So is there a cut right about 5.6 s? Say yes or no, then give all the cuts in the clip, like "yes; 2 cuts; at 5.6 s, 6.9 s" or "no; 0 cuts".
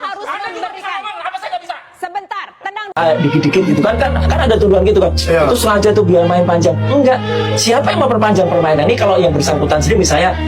no; 1 cut; at 3.0 s